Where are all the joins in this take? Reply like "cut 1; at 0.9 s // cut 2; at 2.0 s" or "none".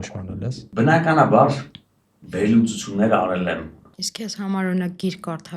cut 1; at 4.0 s